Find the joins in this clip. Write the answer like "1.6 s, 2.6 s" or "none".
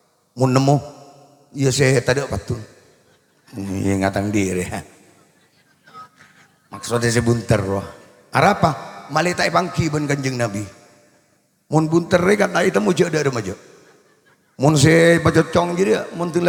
none